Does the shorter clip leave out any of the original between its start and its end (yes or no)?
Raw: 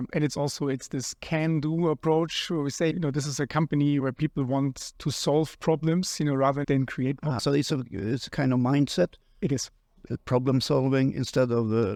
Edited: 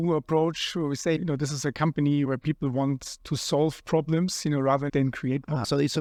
no